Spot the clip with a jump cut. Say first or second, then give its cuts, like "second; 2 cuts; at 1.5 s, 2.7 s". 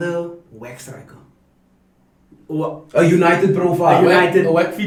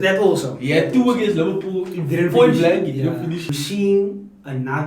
second; 1 cut; at 3.4 s